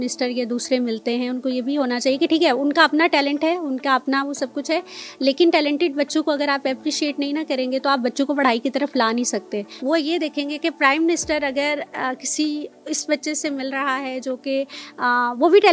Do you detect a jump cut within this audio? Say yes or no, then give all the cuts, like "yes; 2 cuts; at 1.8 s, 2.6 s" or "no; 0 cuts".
no; 0 cuts